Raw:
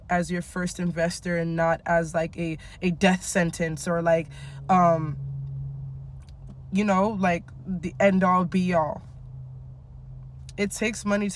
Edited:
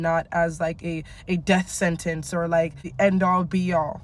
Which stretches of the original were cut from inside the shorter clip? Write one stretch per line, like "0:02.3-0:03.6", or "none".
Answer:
0:04.4-0:07.8